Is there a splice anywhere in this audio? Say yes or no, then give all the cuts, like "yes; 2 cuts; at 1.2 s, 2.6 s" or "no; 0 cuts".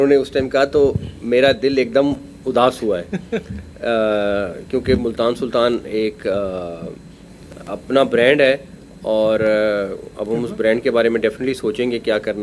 no; 0 cuts